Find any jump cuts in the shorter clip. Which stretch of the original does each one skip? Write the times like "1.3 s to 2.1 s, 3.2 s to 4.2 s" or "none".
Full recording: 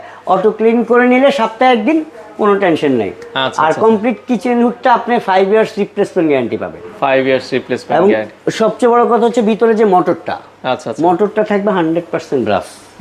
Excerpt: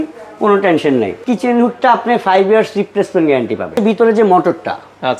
3.2 s to 4.2 s, 6.8 s to 9.4 s